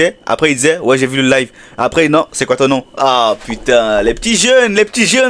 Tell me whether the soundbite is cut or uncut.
uncut